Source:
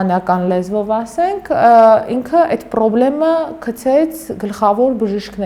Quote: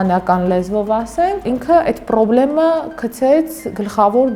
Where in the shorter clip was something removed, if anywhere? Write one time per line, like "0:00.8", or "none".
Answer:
0:01.4